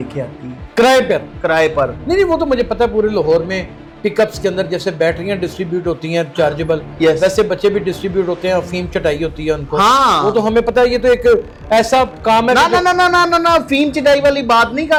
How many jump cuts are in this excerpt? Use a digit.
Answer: 0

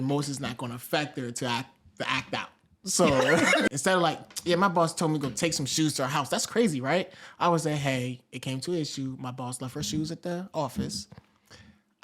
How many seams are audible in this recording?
1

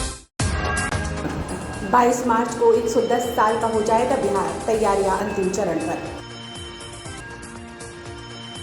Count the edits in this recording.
1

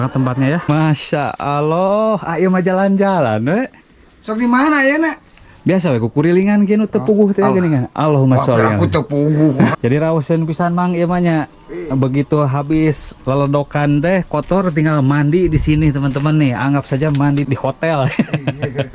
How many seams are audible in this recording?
3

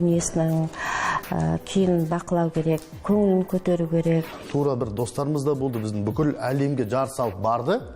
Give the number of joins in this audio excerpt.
1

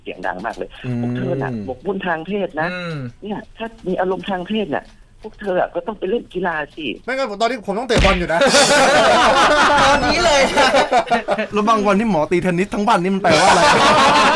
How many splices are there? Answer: 3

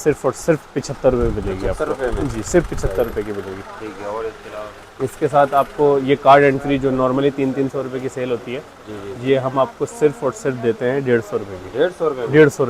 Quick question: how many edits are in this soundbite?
0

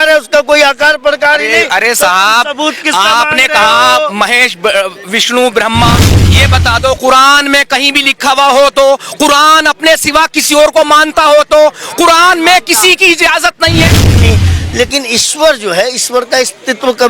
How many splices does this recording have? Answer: 1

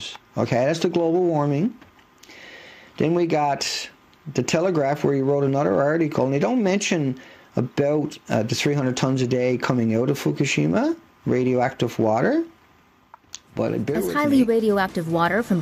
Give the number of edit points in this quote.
1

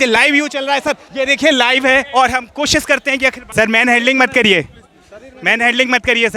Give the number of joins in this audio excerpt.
2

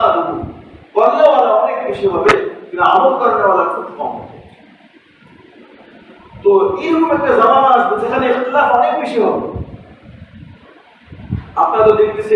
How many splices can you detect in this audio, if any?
0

